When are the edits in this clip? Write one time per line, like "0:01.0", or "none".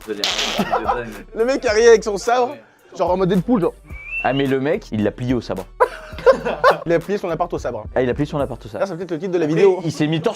0:04.9